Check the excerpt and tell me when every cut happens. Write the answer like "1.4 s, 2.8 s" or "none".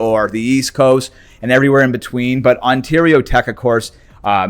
none